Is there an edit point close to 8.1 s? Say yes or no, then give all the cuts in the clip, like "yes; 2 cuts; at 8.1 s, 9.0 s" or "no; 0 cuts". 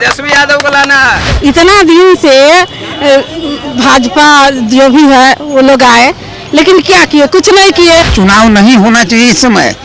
yes; 2 cuts; at 1.3 s, 8.1 s